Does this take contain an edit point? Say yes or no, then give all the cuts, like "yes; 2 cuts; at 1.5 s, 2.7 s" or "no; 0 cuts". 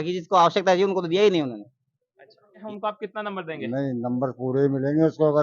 yes; 1 cut; at 2.5 s